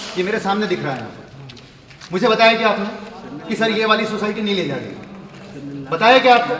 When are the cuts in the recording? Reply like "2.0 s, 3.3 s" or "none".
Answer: none